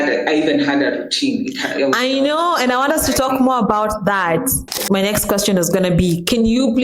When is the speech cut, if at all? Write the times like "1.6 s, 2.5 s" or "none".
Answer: 4.8 s